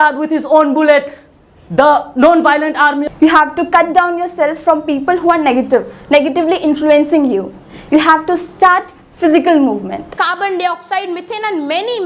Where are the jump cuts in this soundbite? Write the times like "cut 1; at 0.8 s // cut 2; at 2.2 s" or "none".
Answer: cut 1; at 3.0 s // cut 2; at 10.2 s